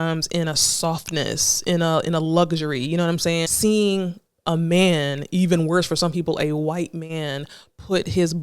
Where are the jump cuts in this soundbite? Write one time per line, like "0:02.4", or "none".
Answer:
0:03.5